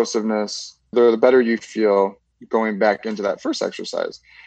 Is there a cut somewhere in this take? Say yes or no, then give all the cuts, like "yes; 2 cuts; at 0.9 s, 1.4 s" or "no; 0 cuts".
yes; 1 cut; at 0.9 s